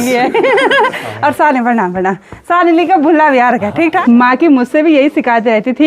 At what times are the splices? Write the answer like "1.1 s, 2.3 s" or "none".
4.0 s